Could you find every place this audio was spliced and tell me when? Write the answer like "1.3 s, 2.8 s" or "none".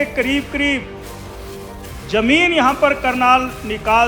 none